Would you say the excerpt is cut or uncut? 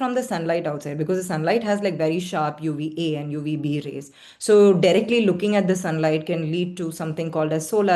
uncut